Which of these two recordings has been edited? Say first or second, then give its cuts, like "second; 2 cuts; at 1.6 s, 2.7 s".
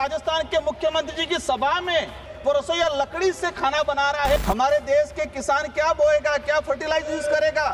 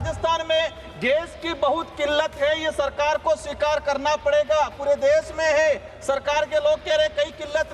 first; 2 cuts; at 2.3 s, 4.4 s